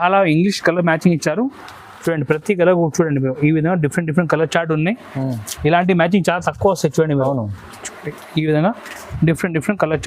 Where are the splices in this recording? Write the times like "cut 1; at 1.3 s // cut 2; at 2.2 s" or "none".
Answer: none